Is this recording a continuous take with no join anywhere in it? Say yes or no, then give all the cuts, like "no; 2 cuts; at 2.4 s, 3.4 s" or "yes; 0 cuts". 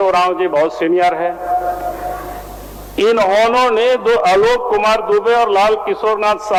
yes; 0 cuts